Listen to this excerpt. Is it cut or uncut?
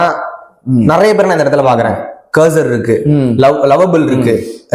uncut